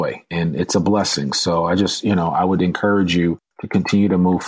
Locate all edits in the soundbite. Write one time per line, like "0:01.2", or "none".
none